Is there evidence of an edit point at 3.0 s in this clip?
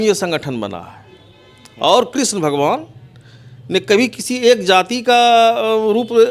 no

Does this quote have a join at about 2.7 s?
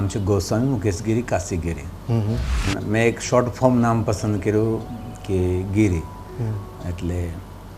yes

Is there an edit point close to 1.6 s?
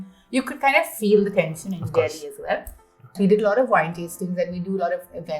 no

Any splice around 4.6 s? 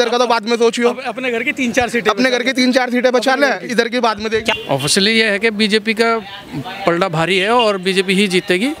yes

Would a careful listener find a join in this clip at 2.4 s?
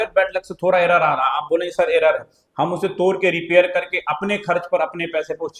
no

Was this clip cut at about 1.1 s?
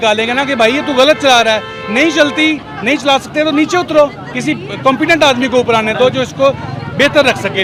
no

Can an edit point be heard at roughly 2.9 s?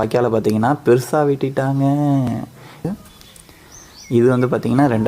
yes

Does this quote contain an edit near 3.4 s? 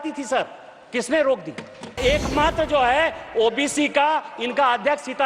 no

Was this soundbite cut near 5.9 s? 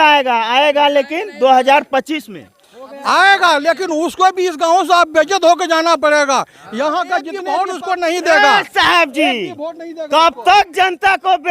no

